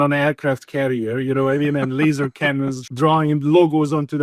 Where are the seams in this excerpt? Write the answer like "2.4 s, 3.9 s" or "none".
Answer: 2.8 s